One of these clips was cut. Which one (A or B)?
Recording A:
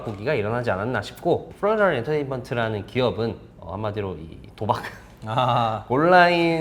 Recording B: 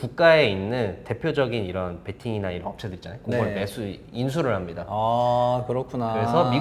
A